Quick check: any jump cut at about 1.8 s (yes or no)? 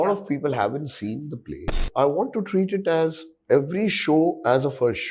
yes